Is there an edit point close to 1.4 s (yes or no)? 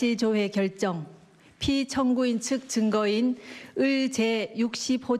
yes